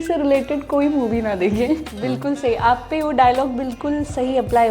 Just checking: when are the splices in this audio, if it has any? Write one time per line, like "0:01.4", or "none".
0:01.8